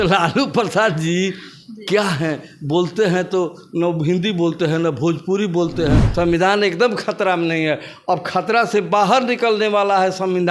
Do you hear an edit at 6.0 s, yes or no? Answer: yes